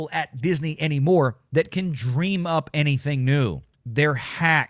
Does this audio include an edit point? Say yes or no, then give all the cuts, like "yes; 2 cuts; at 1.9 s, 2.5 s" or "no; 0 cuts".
yes; 1 cut; at 3.7 s